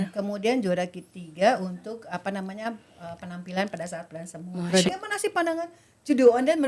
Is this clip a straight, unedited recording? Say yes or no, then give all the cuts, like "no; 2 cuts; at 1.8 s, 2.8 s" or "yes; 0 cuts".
no; 1 cut; at 4.9 s